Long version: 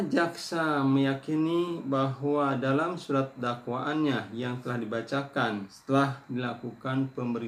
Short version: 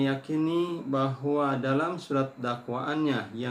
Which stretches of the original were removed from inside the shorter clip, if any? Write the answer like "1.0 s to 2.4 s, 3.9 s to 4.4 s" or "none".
none